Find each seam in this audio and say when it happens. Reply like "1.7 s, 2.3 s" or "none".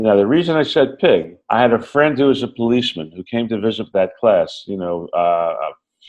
1.4 s